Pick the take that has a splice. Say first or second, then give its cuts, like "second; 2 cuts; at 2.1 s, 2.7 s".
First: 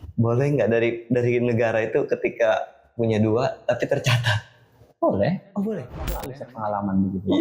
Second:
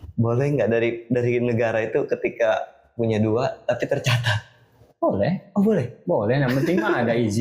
first; 1 cut; at 6.2 s